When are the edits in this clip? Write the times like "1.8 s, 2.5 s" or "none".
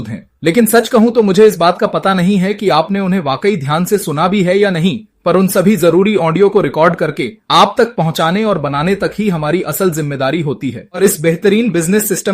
11.0 s